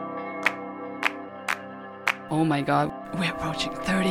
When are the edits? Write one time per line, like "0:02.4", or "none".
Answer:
0:01.3